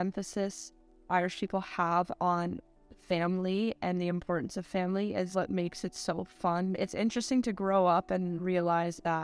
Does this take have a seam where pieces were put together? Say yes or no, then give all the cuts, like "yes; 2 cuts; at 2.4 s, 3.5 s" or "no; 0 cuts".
yes; 2 cuts; at 5.3 s, 6.7 s